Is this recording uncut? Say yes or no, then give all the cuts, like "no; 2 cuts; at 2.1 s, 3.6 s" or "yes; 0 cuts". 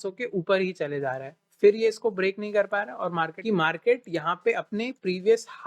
no; 1 cut; at 3.4 s